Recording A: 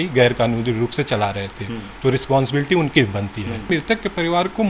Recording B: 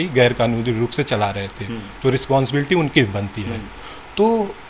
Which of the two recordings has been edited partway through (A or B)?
A